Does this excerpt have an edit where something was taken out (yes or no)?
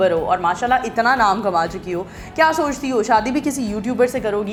no